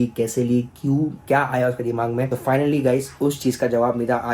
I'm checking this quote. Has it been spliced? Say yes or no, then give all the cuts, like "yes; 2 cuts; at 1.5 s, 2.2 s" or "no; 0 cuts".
no; 0 cuts